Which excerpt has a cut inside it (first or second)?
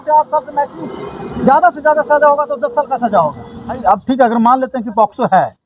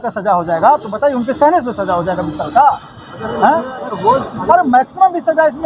first